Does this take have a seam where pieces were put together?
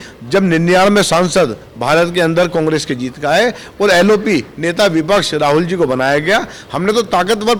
no; 0 cuts

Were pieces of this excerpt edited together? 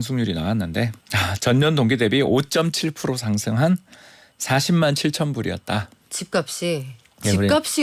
yes; 1 cut; at 1.0 s

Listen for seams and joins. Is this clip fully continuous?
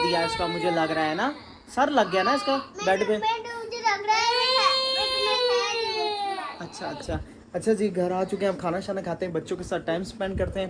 yes; 0 cuts

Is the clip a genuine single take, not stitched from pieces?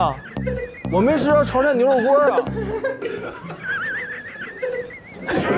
no; 1 cut; at 3.0 s

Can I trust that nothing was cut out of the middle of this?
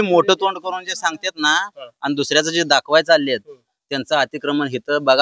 yes; 0 cuts

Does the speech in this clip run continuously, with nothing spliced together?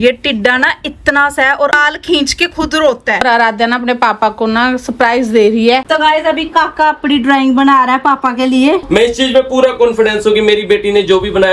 no; 4 cuts; at 1.8 s, 3.2 s, 5.8 s, 8.8 s

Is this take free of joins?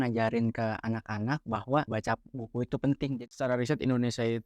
no; 2 cuts; at 1.9 s, 3.2 s

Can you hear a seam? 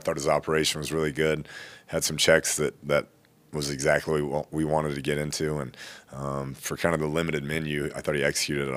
no; 0 cuts

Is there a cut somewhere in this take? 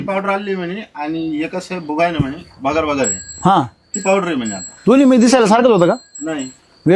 no; 0 cuts

